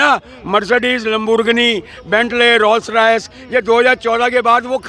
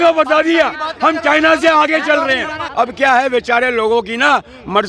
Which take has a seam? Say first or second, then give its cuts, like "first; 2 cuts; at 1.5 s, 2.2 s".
second; 1 cut; at 2.6 s